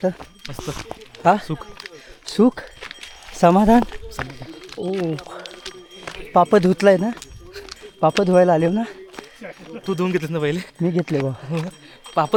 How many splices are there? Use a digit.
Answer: 0